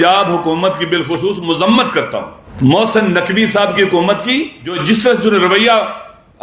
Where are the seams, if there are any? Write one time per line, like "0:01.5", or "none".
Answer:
0:02.4
0:04.8